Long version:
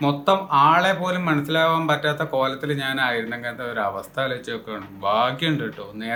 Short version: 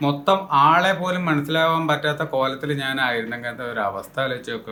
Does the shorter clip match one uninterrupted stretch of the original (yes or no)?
yes